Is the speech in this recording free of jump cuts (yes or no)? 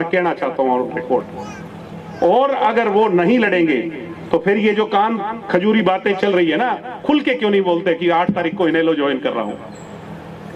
yes